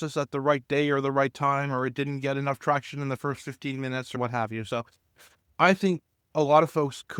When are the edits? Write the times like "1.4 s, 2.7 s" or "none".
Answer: none